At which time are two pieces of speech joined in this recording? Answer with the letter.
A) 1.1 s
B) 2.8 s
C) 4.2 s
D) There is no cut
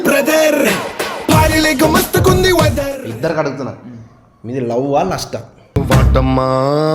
B